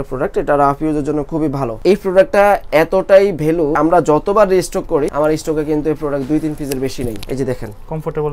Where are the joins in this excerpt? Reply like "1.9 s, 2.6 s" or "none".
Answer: 1.8 s, 3.8 s, 5.1 s, 7.2 s

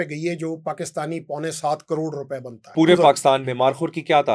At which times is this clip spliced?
2.6 s

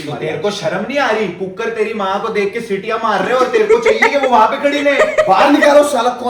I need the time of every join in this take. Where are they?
none

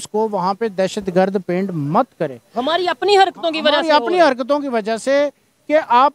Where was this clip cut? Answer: none

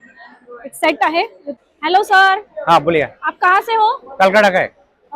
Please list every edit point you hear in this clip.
1.5 s

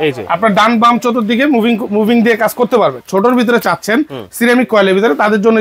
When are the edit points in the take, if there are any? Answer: 3.0 s

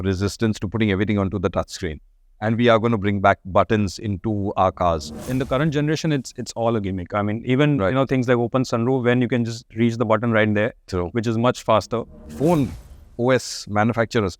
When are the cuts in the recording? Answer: 5.3 s, 12.2 s

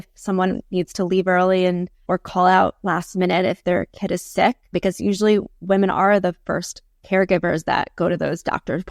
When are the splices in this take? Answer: 2.0 s, 4.7 s

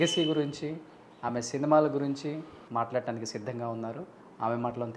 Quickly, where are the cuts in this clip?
2.6 s

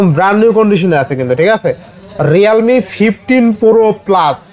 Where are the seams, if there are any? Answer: none

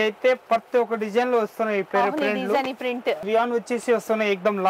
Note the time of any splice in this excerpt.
3.2 s

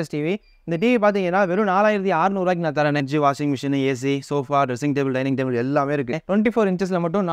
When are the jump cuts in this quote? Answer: 3.1 s, 6.2 s

